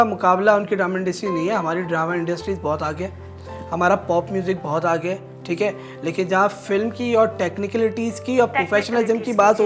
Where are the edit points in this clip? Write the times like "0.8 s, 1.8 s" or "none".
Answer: none

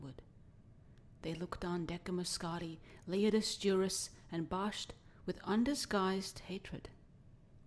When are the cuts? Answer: 1.7 s

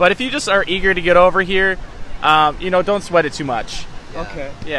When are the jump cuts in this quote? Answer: none

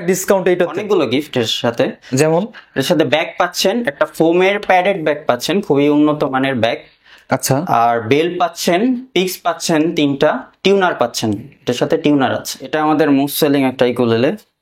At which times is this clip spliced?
0.8 s, 12.7 s

